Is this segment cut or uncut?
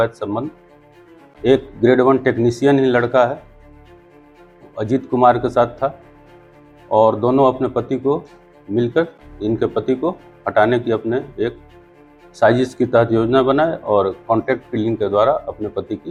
uncut